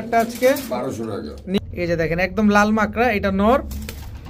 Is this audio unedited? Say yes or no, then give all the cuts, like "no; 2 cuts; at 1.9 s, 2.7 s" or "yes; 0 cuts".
no; 1 cut; at 1.6 s